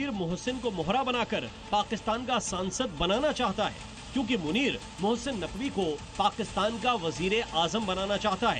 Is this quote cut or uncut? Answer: uncut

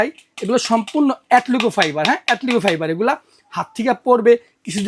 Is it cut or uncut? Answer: uncut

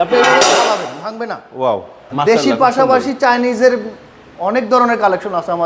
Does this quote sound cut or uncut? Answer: cut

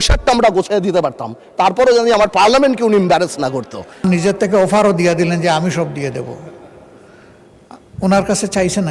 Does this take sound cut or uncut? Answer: cut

